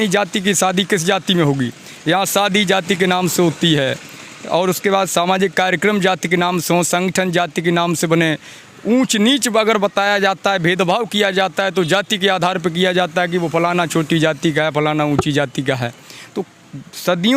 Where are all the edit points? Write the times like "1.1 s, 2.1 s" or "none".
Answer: none